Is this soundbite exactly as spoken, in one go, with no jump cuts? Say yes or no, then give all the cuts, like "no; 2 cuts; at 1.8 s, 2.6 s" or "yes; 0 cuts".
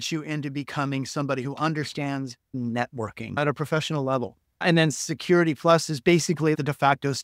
no; 4 cuts; at 2.4 s, 3.4 s, 4.6 s, 6.6 s